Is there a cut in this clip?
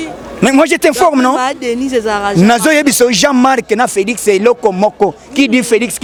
no; 0 cuts

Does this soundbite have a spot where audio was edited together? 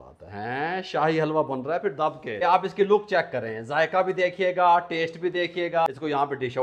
yes; 2 cuts; at 2.4 s, 5.9 s

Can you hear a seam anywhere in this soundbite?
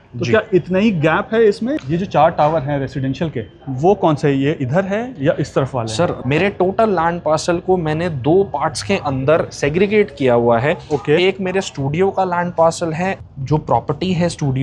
yes; 3 cuts; at 1.8 s, 6.2 s, 13.2 s

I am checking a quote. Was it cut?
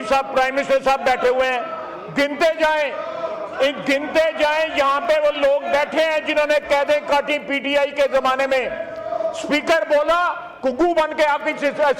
no; 0 cuts

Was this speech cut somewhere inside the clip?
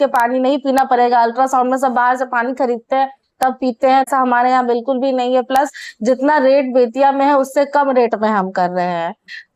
no; 0 cuts

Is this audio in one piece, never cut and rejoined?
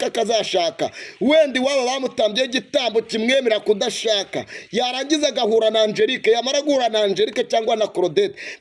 yes; 0 cuts

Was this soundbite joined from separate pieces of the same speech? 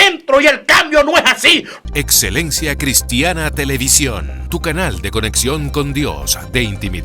yes; 1 cut; at 1.7 s

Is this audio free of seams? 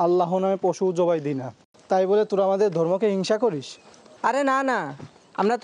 yes; 0 cuts

